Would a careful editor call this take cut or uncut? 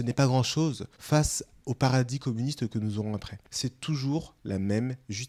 uncut